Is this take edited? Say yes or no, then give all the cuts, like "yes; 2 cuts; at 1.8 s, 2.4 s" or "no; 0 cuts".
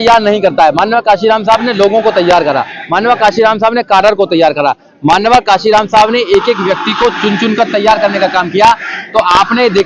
no; 0 cuts